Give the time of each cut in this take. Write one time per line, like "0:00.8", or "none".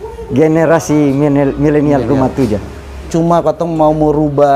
0:03.1